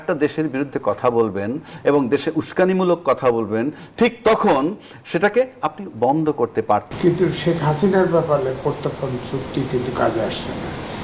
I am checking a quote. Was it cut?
yes; 1 cut; at 6.9 s

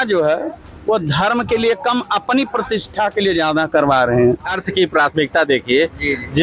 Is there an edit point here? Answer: yes; 1 cut; at 4.5 s

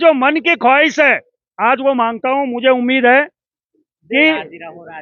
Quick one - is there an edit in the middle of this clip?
no; 0 cuts

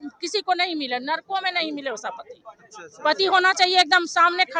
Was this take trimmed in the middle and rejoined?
no; 0 cuts

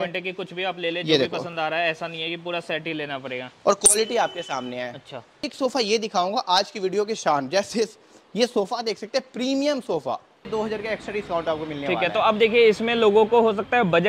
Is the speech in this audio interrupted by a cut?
yes; 2 cuts; at 5.4 s, 10.4 s

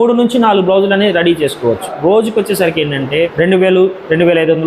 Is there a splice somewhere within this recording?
yes; 2 cuts; at 1.9 s, 3.1 s

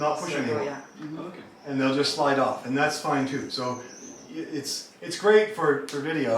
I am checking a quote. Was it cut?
no; 0 cuts

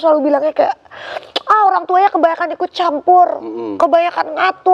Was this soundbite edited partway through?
no; 0 cuts

